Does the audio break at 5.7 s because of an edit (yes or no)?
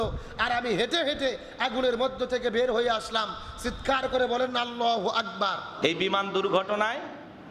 yes